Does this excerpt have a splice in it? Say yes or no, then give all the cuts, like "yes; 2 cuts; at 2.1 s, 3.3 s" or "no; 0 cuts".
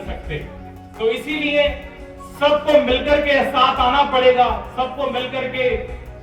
no; 0 cuts